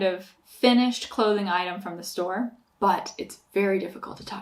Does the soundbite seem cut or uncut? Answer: cut